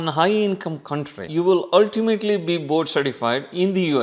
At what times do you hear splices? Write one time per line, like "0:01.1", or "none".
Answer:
0:01.2

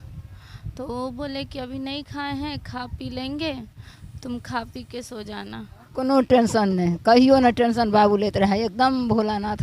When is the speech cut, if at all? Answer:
0:05.8

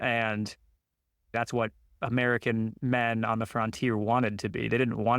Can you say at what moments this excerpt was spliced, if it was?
0:01.3

